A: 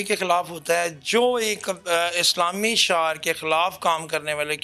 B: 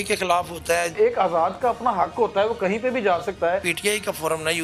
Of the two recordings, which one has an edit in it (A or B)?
B